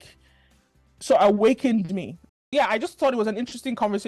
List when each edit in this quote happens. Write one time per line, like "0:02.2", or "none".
0:02.2